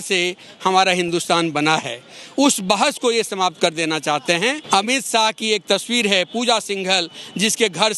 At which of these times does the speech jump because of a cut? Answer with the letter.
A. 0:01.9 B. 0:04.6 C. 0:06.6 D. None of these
B